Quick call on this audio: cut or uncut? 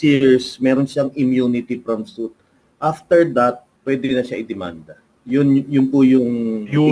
cut